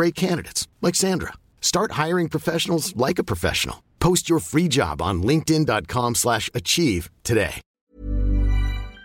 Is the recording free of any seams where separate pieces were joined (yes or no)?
no